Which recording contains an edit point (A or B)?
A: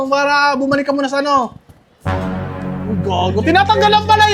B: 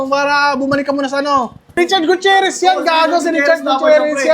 B